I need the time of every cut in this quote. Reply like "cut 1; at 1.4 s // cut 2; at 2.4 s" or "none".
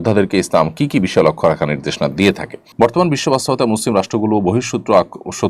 cut 1; at 2.6 s